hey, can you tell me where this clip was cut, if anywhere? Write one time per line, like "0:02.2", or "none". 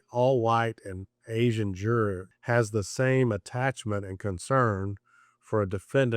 0:02.3